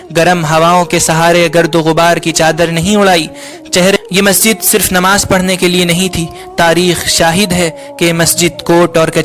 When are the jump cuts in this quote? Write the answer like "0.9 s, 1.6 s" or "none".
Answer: 4.0 s